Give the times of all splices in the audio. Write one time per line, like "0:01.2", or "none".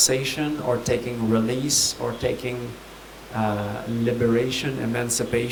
none